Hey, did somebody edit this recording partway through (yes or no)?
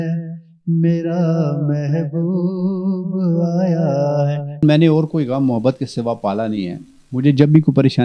yes